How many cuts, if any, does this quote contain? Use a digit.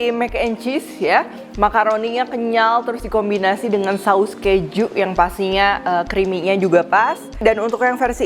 0